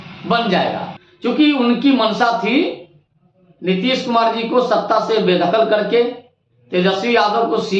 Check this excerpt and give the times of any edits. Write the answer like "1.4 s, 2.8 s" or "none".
0.9 s